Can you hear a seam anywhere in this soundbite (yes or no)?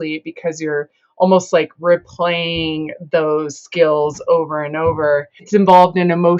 yes